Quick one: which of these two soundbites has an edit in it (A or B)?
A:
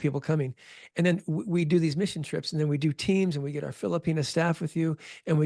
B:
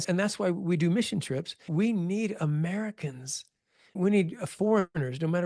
B